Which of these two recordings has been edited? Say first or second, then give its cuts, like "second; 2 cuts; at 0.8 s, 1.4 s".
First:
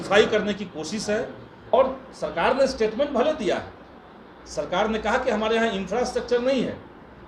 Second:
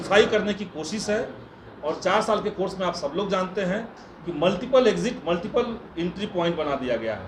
first; 1 cut; at 1.7 s